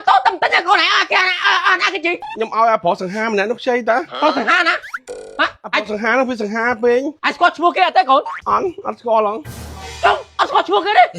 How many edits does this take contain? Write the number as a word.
one